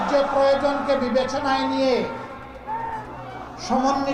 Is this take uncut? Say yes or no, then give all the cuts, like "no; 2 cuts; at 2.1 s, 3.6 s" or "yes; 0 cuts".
yes; 0 cuts